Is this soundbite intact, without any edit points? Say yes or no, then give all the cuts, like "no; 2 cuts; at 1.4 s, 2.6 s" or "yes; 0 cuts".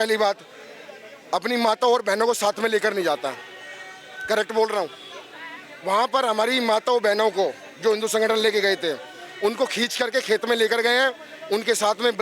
yes; 0 cuts